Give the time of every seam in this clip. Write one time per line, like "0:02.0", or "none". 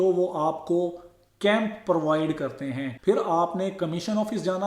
0:02.9